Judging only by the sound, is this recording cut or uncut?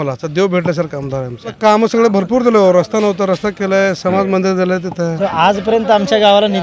cut